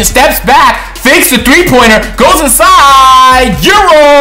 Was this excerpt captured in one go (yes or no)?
yes